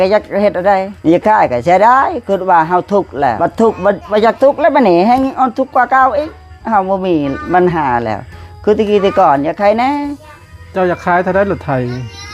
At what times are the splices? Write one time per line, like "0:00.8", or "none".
0:00.9
0:03.4
0:04.0